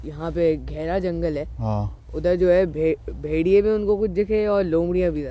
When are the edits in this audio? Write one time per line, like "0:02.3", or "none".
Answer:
none